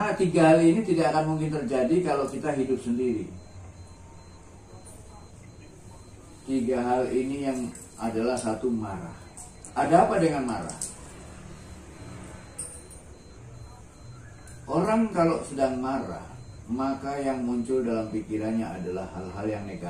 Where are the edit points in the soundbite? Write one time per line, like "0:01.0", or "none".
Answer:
0:04.6
0:09.6